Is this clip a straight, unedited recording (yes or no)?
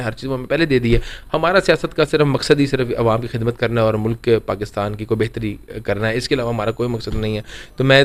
yes